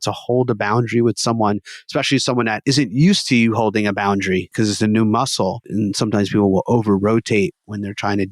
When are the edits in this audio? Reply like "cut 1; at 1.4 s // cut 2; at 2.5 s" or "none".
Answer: cut 1; at 2.6 s // cut 2; at 4.5 s // cut 3; at 5.7 s